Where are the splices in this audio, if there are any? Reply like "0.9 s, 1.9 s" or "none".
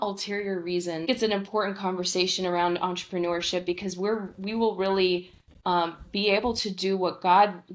1.1 s